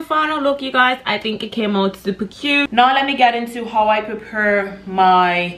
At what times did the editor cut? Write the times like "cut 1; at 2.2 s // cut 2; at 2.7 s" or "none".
cut 1; at 2.7 s